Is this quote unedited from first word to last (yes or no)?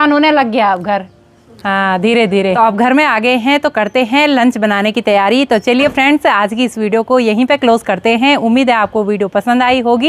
yes